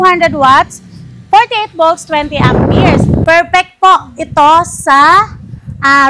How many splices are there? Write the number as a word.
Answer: one